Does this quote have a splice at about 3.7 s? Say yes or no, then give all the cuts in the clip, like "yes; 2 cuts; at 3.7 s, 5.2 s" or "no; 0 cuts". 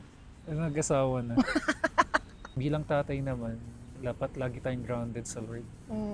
no; 1 cut; at 2.4 s